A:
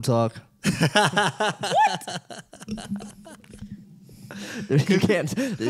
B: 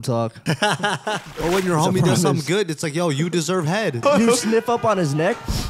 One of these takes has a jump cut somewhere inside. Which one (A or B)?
B